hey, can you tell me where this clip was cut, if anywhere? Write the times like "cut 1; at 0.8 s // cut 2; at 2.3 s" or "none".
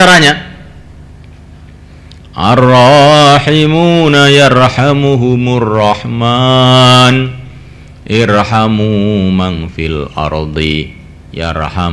none